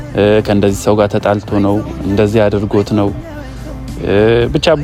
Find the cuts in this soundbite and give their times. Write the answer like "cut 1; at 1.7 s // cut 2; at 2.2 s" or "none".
none